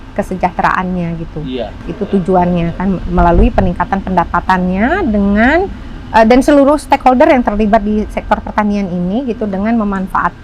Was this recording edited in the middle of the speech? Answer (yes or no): no